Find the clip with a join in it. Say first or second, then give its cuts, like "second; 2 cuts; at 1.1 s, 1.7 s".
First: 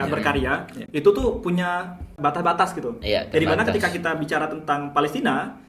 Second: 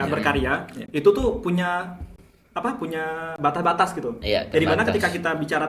first; 1 cut; at 2.1 s